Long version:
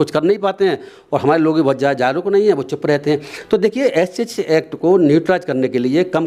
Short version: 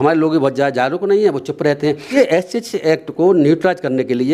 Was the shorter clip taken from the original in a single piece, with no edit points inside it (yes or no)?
no